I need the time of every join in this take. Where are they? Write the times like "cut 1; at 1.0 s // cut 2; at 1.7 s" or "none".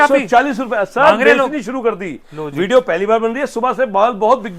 none